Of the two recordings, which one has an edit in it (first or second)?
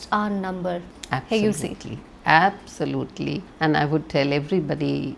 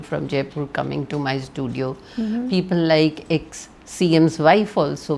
first